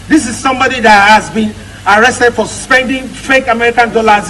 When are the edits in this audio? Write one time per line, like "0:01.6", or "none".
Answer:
0:02.6